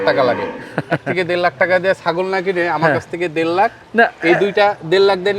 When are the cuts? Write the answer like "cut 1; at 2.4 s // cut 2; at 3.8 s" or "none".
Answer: none